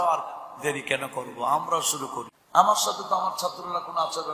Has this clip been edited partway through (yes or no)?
yes